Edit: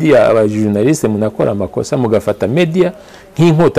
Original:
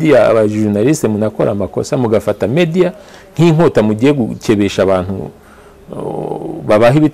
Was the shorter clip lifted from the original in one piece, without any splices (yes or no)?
yes